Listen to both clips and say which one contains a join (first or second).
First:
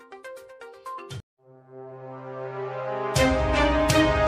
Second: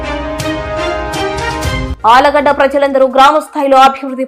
second